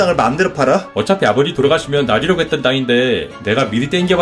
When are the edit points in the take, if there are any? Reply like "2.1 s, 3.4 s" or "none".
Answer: 0.9 s, 3.3 s